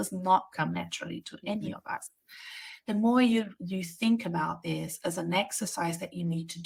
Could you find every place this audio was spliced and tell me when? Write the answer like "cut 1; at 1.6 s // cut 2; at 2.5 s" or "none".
none